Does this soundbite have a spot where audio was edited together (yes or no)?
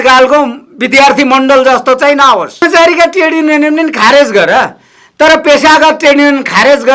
yes